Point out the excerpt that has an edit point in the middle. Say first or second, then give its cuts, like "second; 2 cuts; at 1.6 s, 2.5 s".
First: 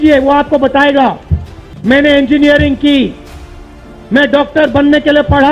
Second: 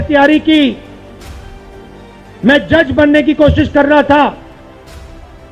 second; 2 cuts; at 0.8 s, 2.4 s